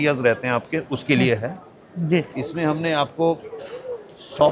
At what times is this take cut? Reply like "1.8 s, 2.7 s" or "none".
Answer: none